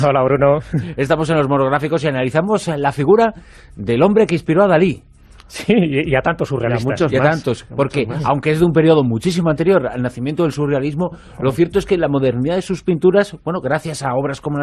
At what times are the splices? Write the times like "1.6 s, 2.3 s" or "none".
4.3 s